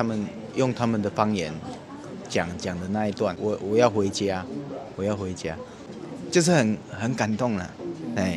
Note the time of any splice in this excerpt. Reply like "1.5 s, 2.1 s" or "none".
3.4 s, 5.8 s